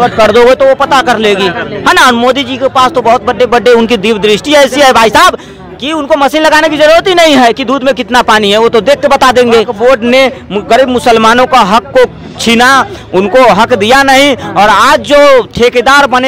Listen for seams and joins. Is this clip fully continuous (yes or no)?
no